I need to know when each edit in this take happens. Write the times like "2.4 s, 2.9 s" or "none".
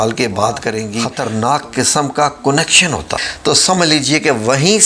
1.1 s, 3.3 s